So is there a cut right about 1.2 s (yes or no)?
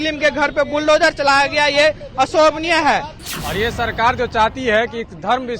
no